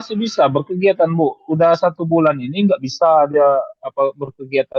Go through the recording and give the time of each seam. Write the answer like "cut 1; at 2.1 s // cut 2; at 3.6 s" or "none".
none